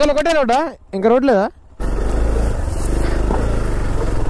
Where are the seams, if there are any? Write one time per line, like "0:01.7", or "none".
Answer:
0:01.8